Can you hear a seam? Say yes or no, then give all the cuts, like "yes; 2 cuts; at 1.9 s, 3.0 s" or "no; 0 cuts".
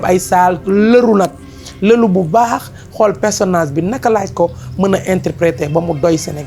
no; 0 cuts